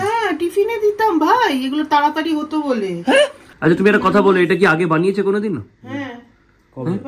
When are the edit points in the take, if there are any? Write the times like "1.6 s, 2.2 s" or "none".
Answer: 3.5 s